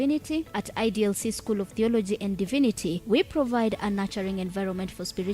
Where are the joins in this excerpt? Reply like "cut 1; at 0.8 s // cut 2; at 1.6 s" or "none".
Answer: cut 1; at 2.4 s